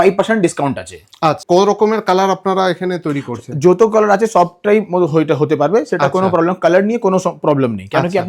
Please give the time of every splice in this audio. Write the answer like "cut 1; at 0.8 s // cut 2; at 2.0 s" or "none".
cut 1; at 1.4 s